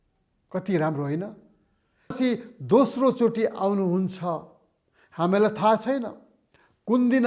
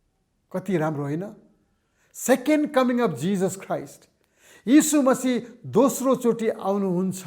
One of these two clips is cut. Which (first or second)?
first